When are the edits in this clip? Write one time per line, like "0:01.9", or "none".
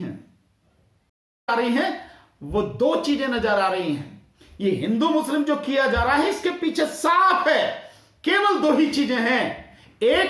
0:01.5